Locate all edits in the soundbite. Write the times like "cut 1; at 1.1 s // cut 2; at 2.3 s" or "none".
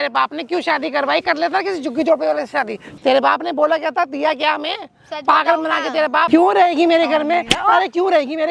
cut 1; at 2.8 s // cut 2; at 6.3 s